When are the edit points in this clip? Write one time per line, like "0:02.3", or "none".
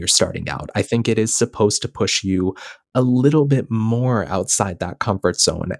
none

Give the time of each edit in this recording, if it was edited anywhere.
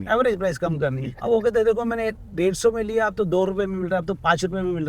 0:01.1

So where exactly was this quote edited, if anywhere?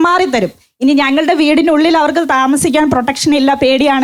none

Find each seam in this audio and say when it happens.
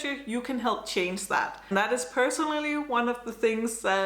0:01.6

